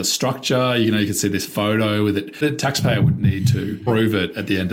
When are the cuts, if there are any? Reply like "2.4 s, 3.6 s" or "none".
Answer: 2.3 s, 3.8 s